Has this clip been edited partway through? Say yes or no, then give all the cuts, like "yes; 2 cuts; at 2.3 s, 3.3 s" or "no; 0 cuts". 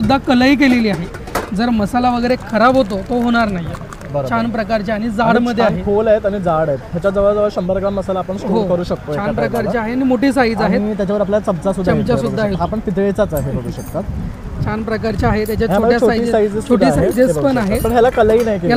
no; 0 cuts